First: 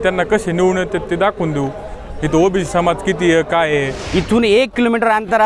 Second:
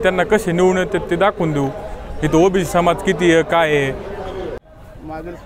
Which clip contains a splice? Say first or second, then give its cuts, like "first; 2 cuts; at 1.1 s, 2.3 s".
first; 1 cut; at 4.0 s